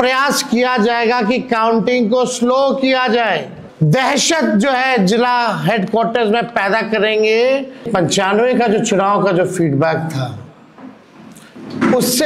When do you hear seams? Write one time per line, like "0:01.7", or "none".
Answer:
0:03.6
0:07.9